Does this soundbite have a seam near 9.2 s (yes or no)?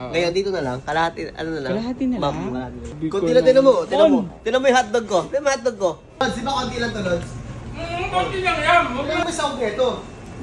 yes